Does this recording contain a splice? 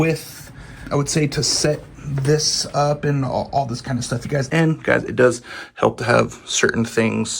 yes; 2 cuts; at 0.8 s, 4.5 s

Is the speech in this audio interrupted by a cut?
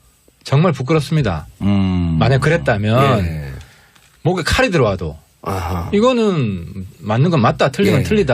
yes; 1 cut; at 4.0 s

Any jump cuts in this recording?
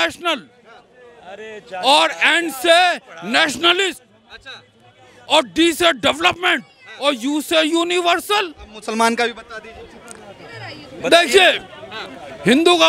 no; 0 cuts

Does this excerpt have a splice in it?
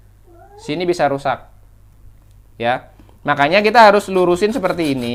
no; 0 cuts

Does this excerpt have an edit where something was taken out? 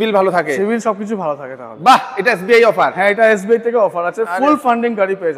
no; 0 cuts

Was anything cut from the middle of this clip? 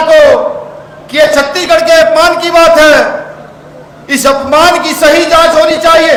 no; 0 cuts

